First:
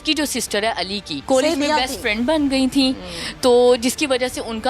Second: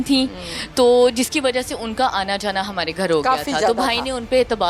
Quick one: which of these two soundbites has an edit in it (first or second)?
first